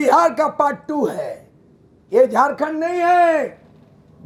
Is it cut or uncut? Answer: uncut